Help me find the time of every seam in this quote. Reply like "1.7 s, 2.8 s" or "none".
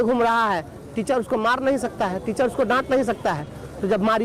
none